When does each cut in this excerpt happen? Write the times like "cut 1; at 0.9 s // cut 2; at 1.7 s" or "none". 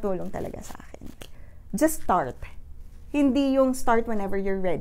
cut 1; at 1.3 s